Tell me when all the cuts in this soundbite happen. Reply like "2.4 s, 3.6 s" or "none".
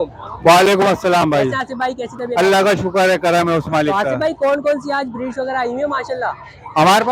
none